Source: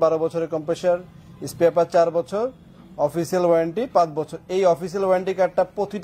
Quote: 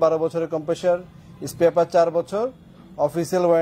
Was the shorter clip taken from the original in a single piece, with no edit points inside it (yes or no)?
yes